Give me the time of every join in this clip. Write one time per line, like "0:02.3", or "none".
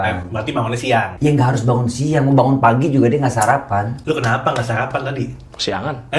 none